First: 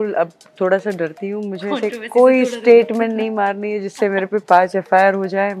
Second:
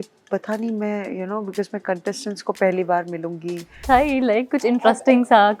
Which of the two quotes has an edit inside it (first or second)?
second